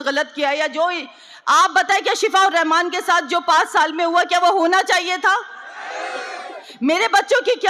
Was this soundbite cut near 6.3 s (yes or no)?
no